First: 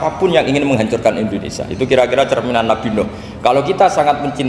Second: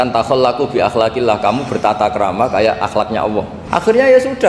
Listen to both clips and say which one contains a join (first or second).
second